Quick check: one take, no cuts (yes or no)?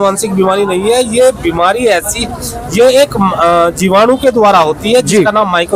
yes